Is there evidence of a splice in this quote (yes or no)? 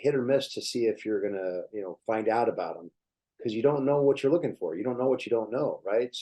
no